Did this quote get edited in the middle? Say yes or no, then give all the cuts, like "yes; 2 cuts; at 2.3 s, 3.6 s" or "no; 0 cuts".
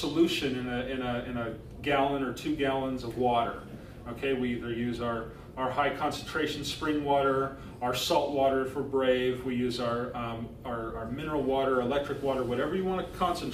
no; 0 cuts